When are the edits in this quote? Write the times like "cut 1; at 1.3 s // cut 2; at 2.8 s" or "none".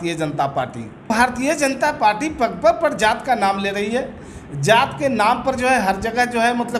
cut 1; at 1.1 s